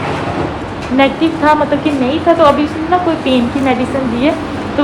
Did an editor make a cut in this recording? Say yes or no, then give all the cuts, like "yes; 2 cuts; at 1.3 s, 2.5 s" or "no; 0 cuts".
no; 0 cuts